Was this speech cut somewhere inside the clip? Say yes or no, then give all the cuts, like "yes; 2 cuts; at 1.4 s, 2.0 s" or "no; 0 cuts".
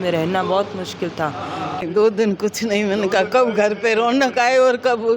yes; 1 cut; at 1.8 s